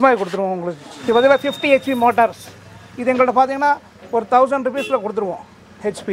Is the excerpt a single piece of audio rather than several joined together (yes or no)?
no